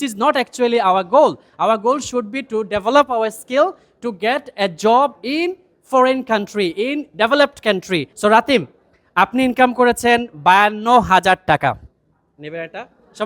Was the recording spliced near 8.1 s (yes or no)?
yes